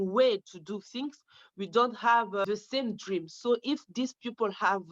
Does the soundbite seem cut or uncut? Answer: cut